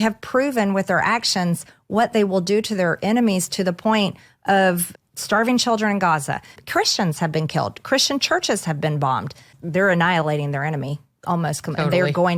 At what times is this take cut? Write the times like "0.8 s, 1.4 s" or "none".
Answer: 4.9 s, 6.5 s, 9.5 s